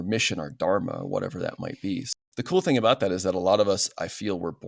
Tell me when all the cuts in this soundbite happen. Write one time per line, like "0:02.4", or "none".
0:02.1